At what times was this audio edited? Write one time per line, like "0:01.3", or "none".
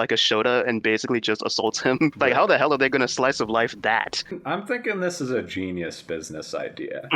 0:00.8
0:02.1
0:04.3